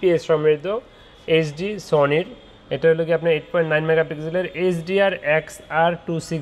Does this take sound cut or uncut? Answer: uncut